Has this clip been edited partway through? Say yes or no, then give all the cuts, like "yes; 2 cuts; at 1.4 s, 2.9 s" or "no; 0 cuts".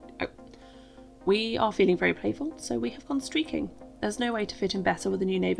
no; 0 cuts